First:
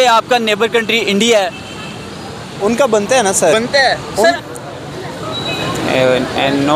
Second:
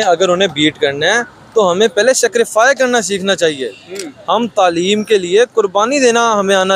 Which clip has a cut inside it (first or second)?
first